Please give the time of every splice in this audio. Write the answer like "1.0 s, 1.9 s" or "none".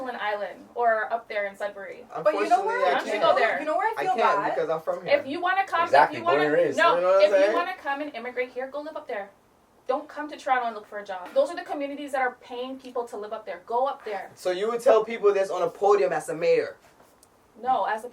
11.3 s